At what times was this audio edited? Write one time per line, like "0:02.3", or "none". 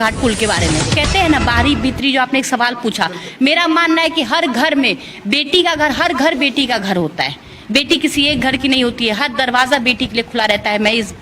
0:01.0

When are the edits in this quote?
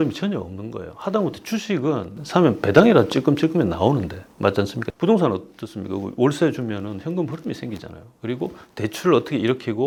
none

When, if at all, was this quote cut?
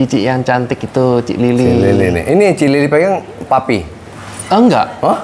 none

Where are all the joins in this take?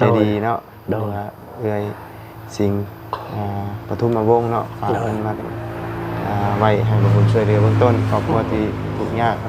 none

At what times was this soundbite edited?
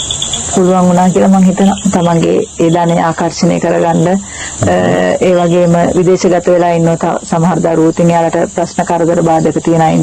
0:01.8

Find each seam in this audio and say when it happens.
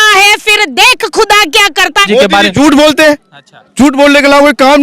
0:02.1

